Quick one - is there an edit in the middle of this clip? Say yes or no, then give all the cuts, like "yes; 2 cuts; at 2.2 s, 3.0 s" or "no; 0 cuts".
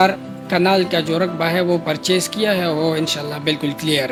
no; 0 cuts